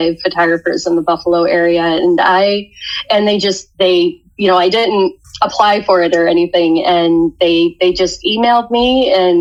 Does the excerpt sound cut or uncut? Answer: uncut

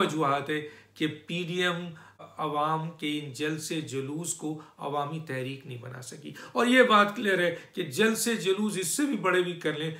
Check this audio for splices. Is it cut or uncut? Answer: cut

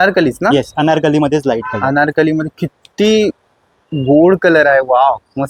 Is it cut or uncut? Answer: uncut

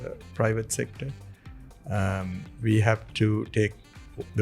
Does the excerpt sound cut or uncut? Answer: uncut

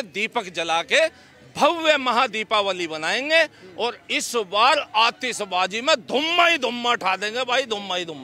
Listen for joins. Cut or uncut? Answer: uncut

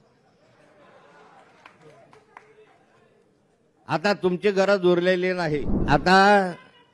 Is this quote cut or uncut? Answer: cut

